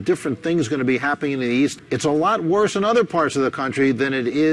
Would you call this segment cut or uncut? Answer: uncut